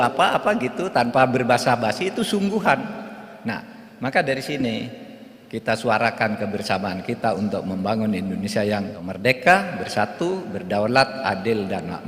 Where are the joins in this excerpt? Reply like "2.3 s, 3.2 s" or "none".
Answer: 9.0 s